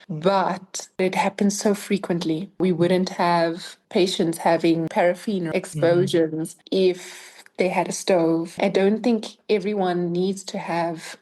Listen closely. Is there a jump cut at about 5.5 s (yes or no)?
yes